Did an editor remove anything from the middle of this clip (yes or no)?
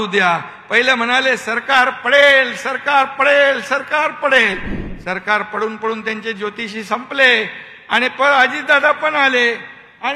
no